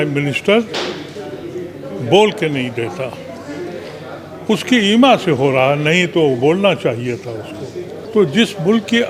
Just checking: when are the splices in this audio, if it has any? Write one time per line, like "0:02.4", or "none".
0:08.0